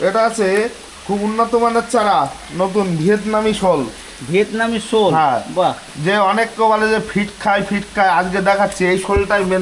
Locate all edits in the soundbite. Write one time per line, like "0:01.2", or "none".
none